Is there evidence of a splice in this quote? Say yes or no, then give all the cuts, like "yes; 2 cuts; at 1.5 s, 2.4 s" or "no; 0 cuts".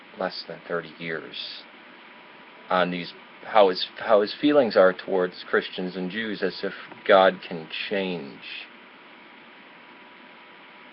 no; 0 cuts